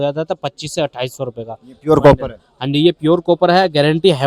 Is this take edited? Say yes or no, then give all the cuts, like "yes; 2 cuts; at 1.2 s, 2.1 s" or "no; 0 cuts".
no; 0 cuts